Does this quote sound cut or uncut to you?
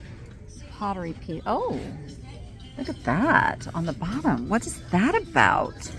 uncut